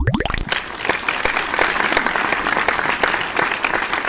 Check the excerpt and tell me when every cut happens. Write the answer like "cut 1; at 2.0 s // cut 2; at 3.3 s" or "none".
none